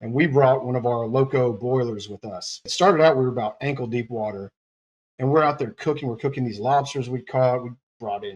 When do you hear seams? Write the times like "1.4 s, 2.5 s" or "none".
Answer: 2.7 s